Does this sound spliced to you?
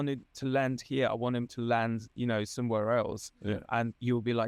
no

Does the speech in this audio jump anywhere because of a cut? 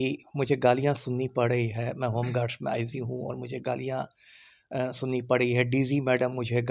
no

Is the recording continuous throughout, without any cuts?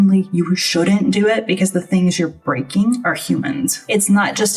no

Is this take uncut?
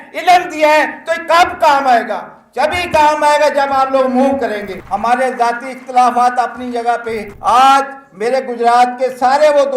no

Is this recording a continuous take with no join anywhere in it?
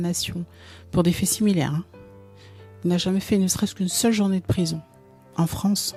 yes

